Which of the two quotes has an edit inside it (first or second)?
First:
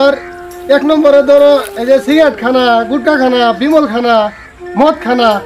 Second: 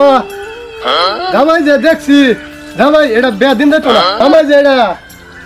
second